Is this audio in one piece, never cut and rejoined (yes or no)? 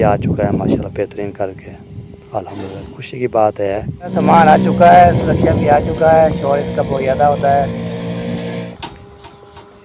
no